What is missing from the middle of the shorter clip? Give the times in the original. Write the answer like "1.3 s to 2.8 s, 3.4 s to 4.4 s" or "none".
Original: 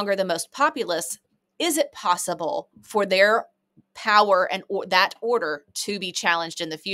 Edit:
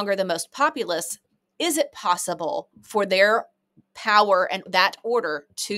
4.7 s to 4.8 s